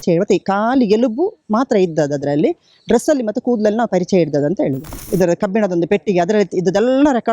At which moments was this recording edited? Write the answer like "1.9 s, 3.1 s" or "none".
4.9 s